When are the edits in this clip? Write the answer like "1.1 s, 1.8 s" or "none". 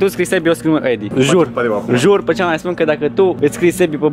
1.1 s, 3.4 s